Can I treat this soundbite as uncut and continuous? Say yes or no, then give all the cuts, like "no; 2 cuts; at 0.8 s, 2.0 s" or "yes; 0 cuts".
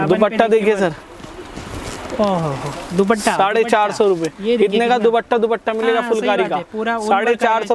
yes; 0 cuts